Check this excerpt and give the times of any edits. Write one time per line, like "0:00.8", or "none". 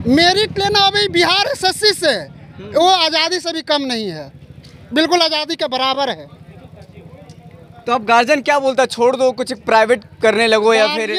none